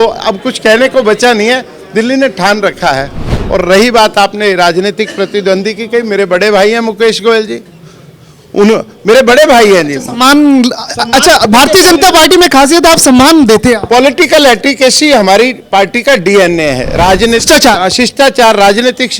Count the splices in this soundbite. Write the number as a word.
one